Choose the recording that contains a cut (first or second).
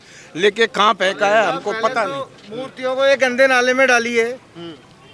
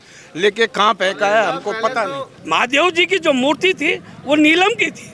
second